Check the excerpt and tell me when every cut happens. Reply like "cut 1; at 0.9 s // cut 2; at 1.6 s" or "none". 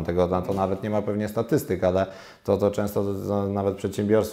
none

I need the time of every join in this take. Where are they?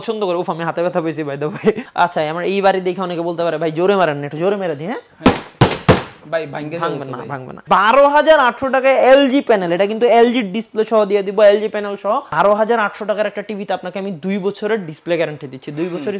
cut 1; at 1.8 s // cut 2; at 7.6 s // cut 3; at 12.3 s

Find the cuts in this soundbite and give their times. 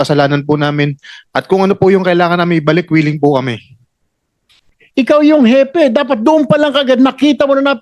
cut 1; at 4.7 s

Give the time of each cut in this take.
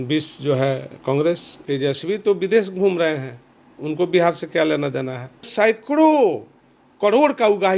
cut 1; at 1.6 s // cut 2; at 5.5 s

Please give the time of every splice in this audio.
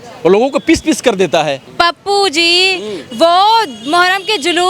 cut 1; at 1.6 s

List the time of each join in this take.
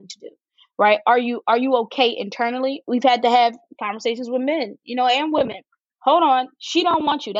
cut 1; at 2.8 s

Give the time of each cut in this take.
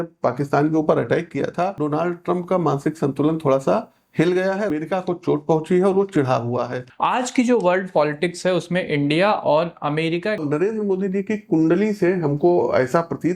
cut 1; at 1.8 s // cut 2; at 4.7 s // cut 3; at 6.8 s // cut 4; at 10.4 s

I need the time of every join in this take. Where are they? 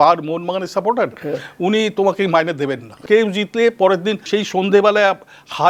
cut 1; at 3.1 s // cut 2; at 4.2 s

